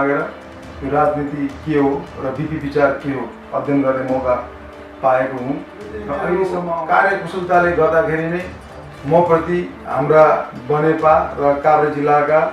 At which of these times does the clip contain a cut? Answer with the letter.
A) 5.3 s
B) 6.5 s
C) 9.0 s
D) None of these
B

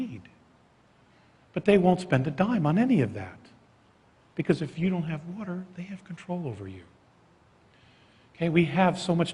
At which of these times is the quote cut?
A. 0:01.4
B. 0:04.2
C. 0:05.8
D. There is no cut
C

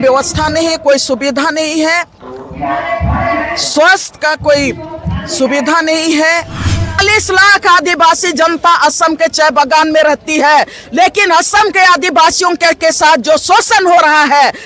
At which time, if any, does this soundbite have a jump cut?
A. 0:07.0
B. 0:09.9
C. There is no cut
A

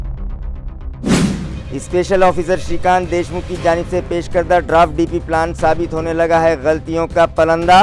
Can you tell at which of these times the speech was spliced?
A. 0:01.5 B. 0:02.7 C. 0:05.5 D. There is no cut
A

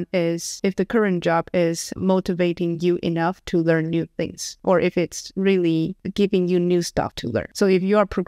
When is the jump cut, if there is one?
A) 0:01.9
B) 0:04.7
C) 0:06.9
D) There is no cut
A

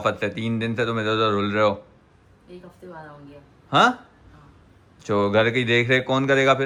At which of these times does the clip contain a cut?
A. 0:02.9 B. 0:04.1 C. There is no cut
C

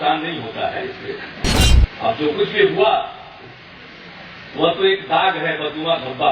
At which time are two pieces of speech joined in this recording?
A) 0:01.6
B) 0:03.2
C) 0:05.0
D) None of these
A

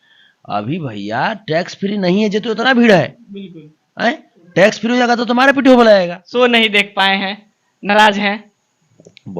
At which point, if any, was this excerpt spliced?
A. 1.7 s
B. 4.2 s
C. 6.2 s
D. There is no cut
C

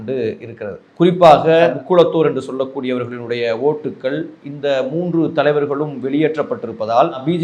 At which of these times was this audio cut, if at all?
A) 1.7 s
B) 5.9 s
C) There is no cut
A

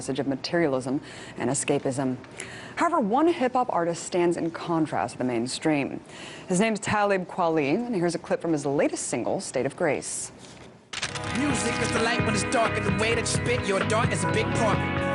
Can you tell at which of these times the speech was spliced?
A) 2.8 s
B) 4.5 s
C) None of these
A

